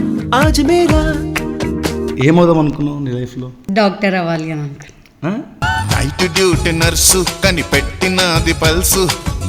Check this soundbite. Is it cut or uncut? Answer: cut